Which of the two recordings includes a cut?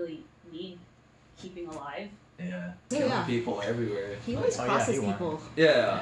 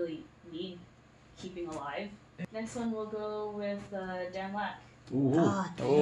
first; 1 cut; at 2.8 s

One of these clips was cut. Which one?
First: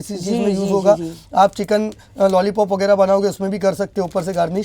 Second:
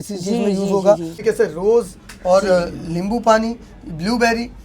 second; 1 cut; at 1.2 s

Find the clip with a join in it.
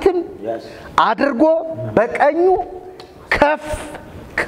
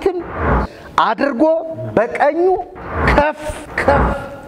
second; 1 cut; at 3.2 s

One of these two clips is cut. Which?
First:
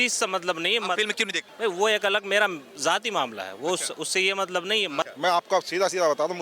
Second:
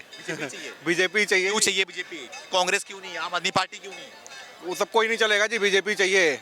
first; 2 cuts; at 1.4 s, 5.1 s

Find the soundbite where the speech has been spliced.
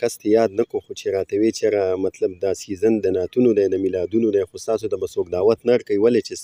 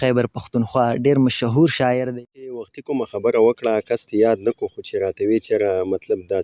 second; 1 cut; at 2.8 s

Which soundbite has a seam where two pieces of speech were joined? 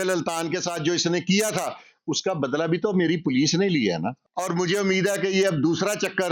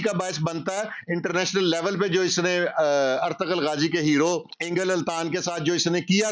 first; 1 cut; at 4.2 s

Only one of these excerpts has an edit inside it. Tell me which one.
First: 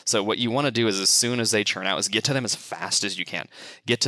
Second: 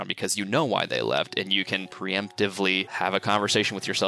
second; 2 cuts; at 1.9 s, 2.9 s

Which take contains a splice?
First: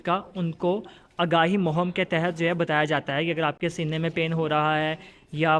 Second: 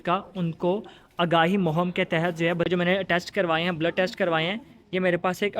second; 1 cut; at 2.7 s

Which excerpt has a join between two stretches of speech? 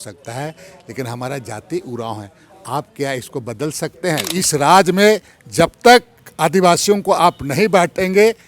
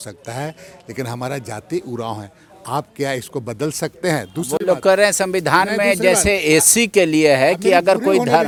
first; 1 cut; at 4.3 s

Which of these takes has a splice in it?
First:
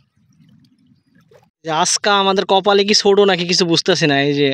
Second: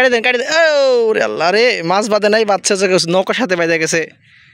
first; 1 cut; at 1.5 s

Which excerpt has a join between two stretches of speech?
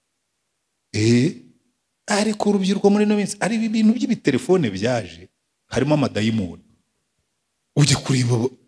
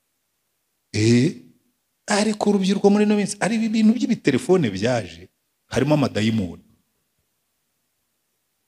first; 1 cut; at 7.8 s

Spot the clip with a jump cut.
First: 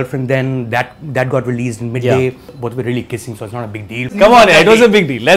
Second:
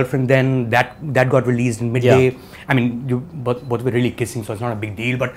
first; 2 cuts; at 2.5 s, 4.1 s

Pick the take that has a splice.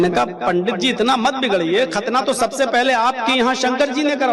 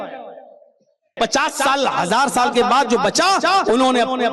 second; 1 cut; at 1.1 s

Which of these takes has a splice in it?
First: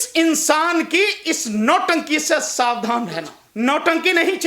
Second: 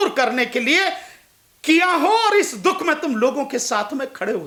first; 1 cut; at 3.4 s

